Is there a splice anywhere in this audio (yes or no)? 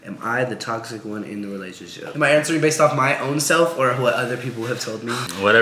no